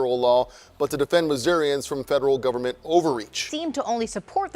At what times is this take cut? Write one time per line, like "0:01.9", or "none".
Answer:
0:03.3